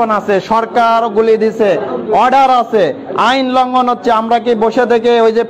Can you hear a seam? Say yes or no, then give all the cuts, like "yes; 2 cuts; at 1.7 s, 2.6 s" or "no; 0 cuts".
no; 0 cuts